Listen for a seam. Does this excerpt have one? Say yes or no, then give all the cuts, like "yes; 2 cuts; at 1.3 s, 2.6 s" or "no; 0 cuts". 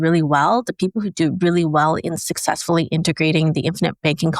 no; 0 cuts